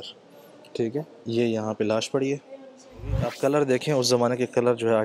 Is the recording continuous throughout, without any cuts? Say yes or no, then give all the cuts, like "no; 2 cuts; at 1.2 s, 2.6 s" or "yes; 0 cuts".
no; 1 cut; at 3.3 s